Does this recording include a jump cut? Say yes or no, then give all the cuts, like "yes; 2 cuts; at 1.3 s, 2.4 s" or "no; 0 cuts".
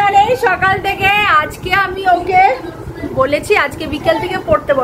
no; 0 cuts